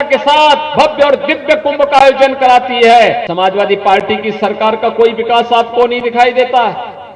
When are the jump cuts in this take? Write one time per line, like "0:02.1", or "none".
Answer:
0:03.3